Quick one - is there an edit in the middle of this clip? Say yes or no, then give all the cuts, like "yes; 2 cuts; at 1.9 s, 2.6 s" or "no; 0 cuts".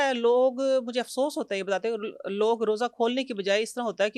no; 0 cuts